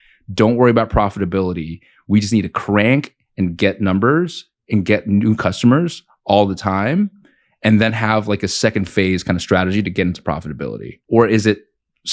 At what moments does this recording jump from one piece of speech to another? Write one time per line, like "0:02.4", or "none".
0:11.0